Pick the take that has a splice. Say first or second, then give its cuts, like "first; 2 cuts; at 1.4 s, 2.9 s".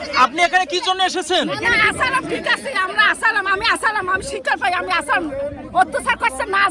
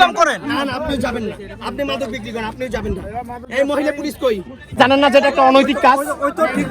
second; 1 cut; at 4.8 s